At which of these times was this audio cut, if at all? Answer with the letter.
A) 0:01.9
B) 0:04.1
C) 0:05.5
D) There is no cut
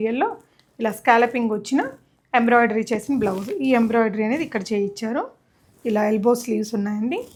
D